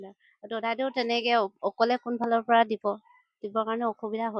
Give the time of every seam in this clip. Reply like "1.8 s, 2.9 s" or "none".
none